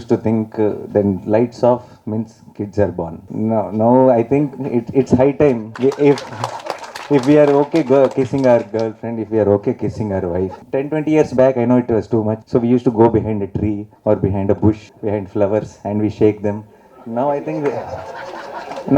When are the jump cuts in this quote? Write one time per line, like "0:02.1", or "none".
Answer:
0:03.2
0:05.7
0:10.6
0:12.4
0:13.9
0:14.9